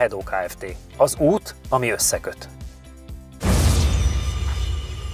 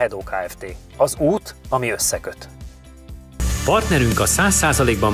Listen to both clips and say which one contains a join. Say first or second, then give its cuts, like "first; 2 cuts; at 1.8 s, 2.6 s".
second; 1 cut; at 3.3 s